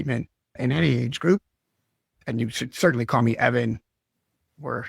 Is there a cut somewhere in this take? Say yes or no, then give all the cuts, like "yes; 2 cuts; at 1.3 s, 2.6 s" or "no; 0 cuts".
no; 0 cuts